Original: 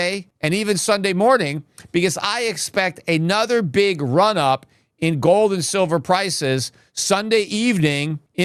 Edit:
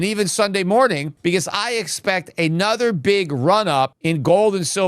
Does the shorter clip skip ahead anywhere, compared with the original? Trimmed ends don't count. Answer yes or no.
yes